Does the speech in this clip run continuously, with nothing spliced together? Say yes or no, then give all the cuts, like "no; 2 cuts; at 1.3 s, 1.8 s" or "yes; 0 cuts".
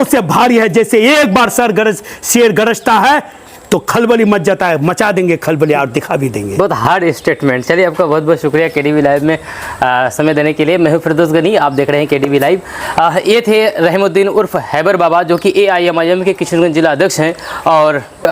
yes; 0 cuts